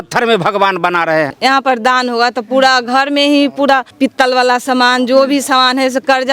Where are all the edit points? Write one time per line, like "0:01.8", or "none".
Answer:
0:01.3
0:03.9